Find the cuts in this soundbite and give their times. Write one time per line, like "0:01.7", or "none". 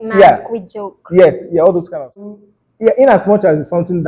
0:02.3